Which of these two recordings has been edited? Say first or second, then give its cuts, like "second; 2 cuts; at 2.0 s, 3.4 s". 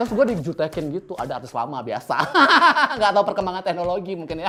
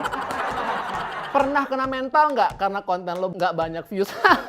second; 2 cuts; at 1.2 s, 3.3 s